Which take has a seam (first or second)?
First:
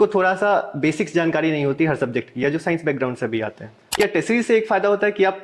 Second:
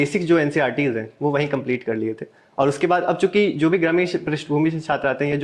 first